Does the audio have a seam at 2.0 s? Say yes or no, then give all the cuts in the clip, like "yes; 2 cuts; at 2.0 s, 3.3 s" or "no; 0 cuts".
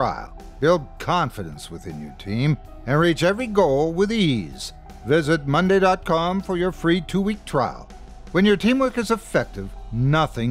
no; 0 cuts